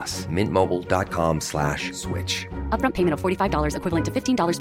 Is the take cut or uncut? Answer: uncut